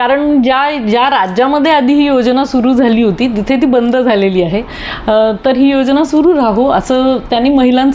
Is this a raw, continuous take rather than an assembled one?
yes; 0 cuts

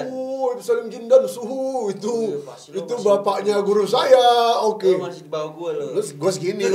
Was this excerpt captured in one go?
yes; 0 cuts

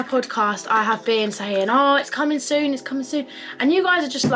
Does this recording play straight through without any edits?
yes; 0 cuts

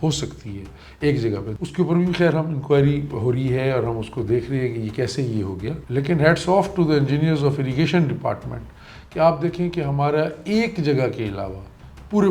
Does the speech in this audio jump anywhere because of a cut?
yes; 2 cuts; at 1.5 s, 5.8 s

